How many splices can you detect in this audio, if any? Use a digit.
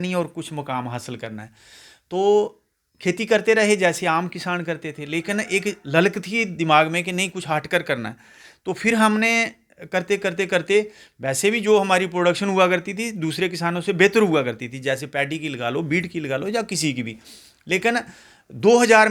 0